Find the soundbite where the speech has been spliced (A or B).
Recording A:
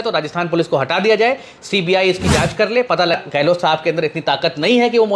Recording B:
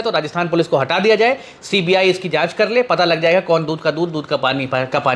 A